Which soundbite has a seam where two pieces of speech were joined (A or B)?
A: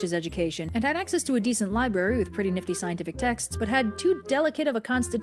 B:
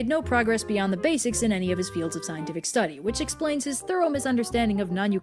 B